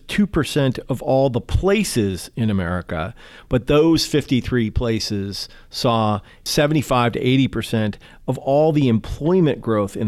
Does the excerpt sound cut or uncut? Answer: uncut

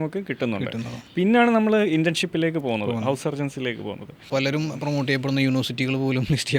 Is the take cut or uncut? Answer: cut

